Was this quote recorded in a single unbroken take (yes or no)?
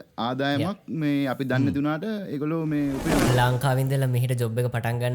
no